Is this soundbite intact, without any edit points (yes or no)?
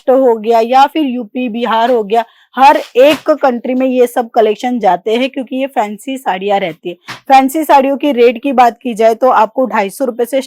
yes